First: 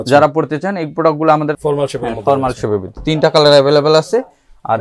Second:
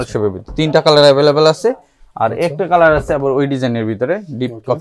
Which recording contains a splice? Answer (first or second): first